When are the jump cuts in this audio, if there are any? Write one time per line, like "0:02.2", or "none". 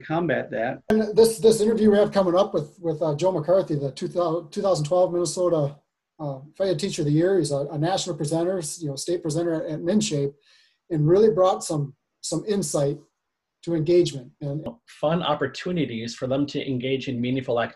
0:00.9
0:14.6